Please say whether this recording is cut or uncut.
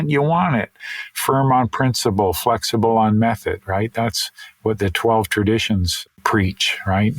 cut